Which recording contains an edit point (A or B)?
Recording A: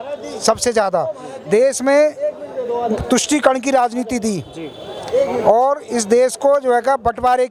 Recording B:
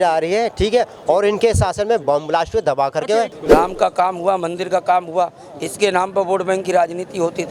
B